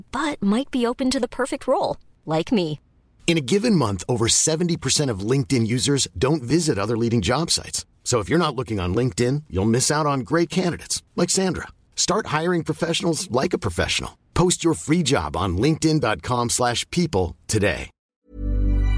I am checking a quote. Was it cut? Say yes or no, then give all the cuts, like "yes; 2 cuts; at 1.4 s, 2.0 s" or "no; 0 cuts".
yes; 1 cut; at 18.0 s